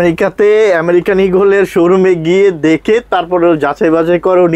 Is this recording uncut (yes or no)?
yes